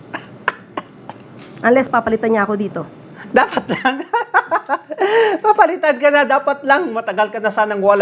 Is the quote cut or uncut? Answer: uncut